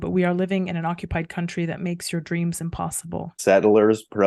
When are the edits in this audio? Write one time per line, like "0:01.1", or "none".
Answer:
0:03.3